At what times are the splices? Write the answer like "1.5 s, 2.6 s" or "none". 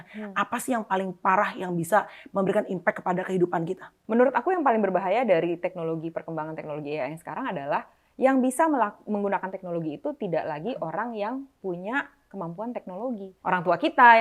3.9 s, 13.3 s

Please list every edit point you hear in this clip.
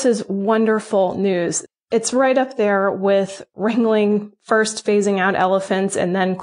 1.6 s

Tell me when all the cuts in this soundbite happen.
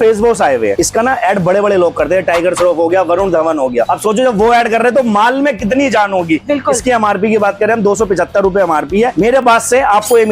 0.8 s, 9.1 s

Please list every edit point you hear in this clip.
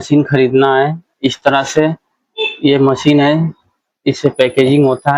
none

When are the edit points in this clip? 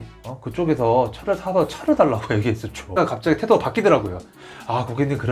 2.9 s

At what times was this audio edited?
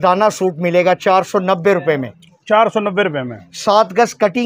none

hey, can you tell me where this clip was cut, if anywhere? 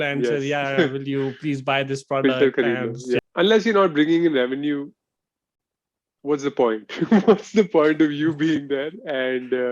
3.2 s

